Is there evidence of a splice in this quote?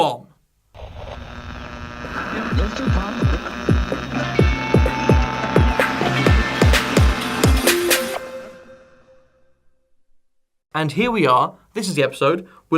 yes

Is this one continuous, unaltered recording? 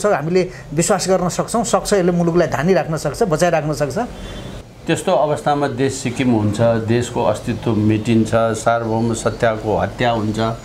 no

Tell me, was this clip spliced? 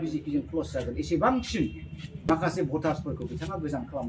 yes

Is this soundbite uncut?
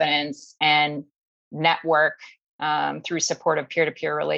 yes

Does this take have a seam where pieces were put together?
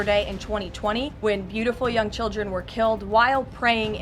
yes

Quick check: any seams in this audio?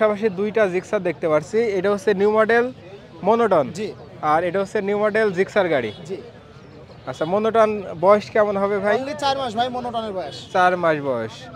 no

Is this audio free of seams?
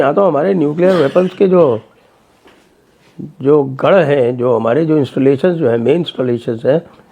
yes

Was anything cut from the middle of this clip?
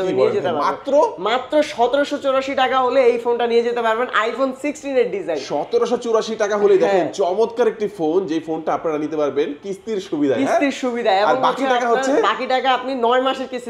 no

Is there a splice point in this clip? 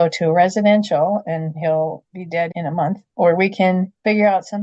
no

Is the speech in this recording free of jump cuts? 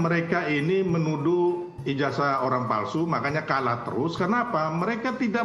yes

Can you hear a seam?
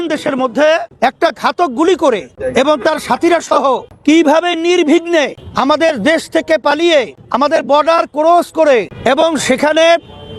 yes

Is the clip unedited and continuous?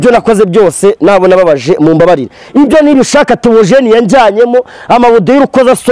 yes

